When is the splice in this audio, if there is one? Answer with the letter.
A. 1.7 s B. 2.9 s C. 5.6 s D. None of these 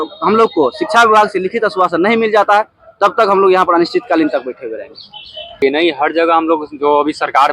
C